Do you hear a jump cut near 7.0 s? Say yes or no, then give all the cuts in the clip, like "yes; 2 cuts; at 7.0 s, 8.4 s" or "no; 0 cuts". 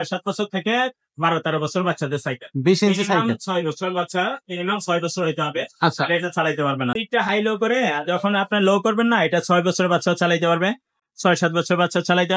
yes; 1 cut; at 7.0 s